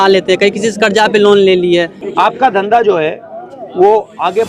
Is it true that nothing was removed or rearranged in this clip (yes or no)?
yes